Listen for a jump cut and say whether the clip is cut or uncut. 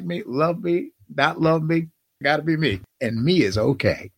cut